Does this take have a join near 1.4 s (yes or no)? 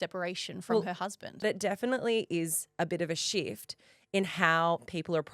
yes